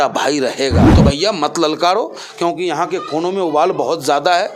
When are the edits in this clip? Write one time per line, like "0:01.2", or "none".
0:00.9